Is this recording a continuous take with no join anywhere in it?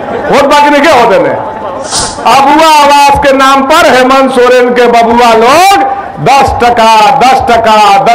no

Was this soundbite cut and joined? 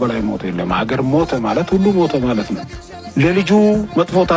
no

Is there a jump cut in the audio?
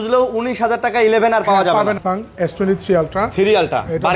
yes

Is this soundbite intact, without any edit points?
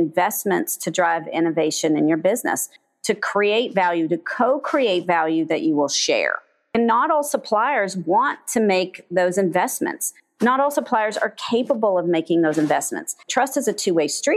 no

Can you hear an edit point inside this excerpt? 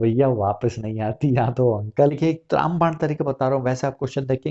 yes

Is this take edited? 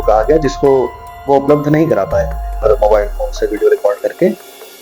yes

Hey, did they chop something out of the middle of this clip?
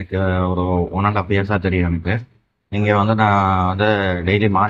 no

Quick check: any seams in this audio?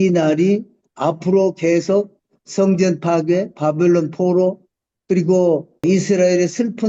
yes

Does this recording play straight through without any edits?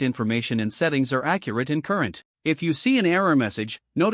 no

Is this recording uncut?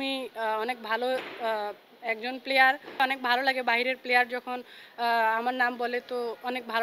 no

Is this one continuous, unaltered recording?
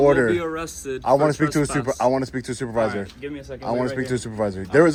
yes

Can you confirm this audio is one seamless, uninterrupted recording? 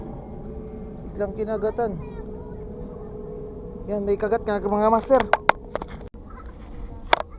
yes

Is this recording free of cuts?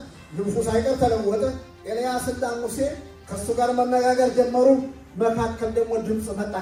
yes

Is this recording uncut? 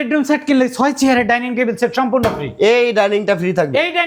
yes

